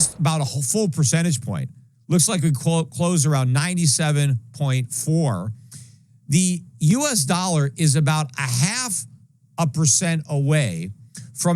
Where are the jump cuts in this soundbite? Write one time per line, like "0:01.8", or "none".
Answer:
none